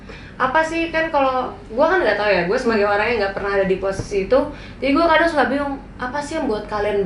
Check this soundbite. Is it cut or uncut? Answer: uncut